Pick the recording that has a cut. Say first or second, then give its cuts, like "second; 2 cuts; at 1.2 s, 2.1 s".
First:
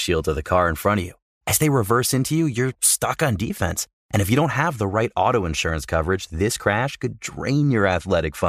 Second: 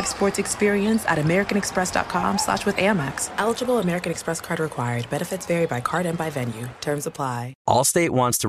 second; 1 cut; at 7.5 s